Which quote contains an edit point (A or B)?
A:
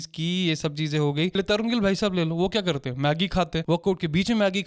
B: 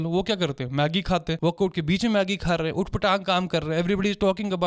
A